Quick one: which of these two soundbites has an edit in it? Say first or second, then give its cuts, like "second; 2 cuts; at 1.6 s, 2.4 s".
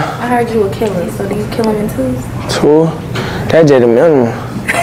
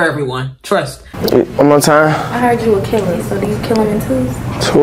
second; 1 cut; at 1.0 s